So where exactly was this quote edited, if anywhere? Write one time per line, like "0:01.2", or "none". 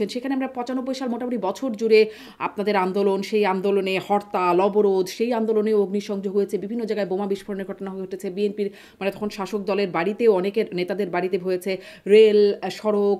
none